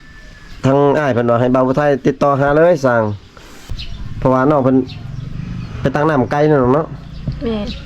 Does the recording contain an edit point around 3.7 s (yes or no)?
yes